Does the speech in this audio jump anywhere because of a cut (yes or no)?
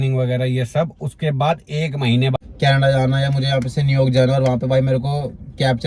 yes